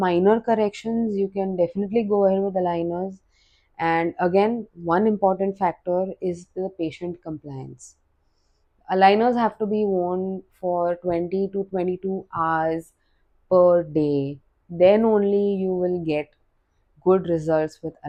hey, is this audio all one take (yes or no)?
yes